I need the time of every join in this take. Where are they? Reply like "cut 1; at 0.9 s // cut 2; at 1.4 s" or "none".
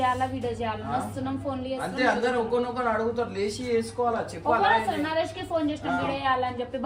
none